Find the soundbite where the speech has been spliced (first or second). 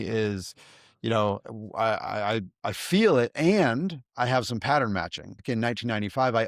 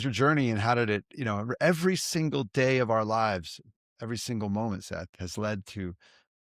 first